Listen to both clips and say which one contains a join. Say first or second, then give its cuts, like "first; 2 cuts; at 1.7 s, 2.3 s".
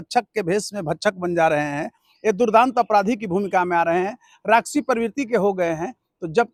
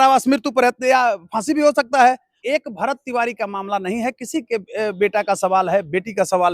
second; 1 cut; at 2.3 s